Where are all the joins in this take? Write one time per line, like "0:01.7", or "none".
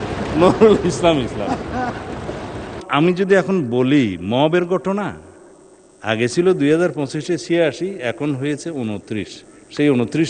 0:02.8